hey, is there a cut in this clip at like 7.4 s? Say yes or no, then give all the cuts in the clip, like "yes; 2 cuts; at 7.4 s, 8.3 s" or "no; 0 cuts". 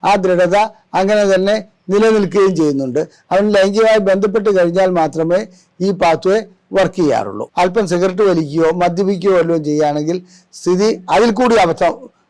yes; 1 cut; at 7.4 s